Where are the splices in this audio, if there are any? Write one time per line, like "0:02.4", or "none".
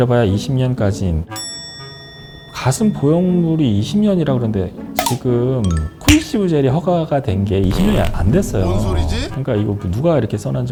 none

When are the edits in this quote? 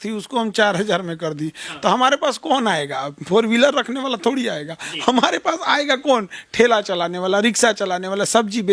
none

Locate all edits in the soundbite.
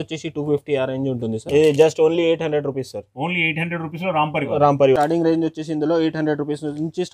0:01.4
0:05.0

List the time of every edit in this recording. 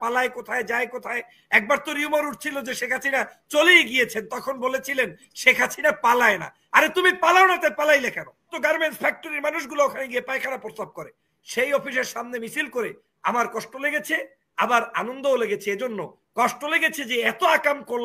0:08.5

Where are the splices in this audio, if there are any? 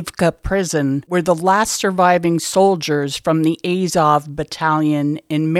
0:01.0

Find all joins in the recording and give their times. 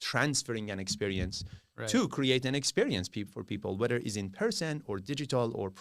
none

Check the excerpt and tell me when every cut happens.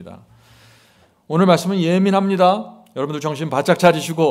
none

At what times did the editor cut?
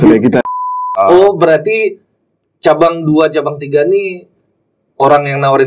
0:00.9

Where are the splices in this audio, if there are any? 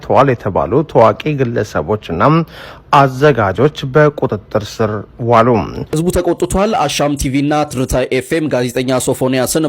0:05.8

